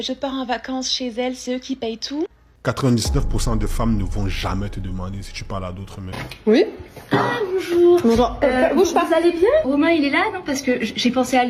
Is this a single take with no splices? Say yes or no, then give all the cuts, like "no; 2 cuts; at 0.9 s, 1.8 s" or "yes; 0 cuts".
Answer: no; 2 cuts; at 2.4 s, 6.2 s